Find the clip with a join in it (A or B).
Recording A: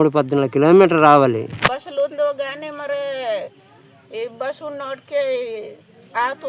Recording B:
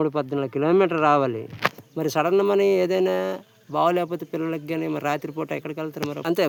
A